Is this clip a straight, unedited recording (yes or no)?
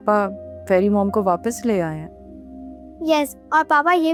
yes